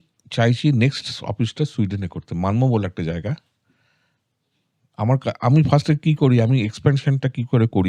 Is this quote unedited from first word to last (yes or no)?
yes